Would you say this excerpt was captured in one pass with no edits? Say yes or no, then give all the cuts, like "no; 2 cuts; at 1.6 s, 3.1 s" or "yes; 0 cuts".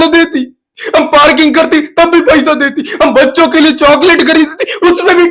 yes; 0 cuts